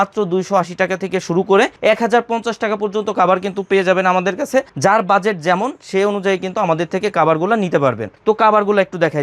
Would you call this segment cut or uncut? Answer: uncut